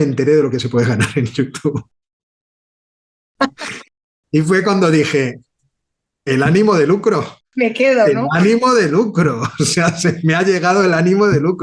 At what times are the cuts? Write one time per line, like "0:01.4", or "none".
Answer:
none

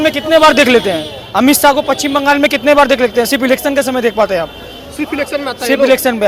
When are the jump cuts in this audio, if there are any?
none

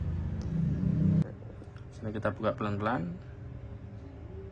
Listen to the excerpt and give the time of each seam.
0:01.2

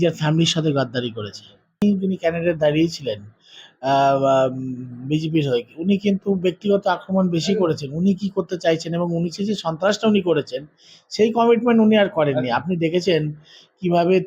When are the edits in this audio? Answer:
0:01.8

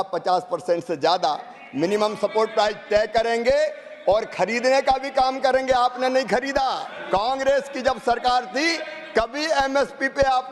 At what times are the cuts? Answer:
0:06.9

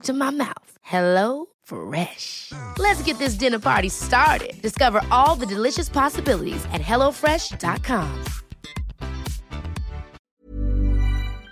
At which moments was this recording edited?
0:10.2

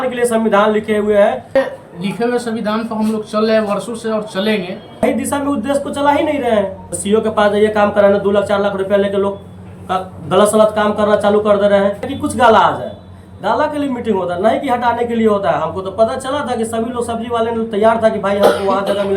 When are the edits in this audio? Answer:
0:01.6
0:05.0
0:06.9
0:12.1

